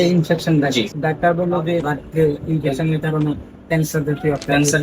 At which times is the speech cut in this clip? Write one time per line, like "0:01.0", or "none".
0:00.9
0:01.9